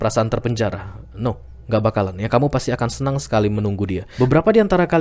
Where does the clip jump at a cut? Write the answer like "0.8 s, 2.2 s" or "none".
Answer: 4.1 s